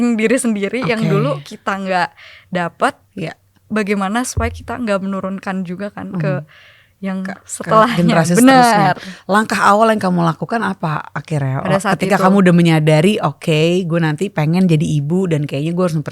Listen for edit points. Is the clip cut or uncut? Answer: uncut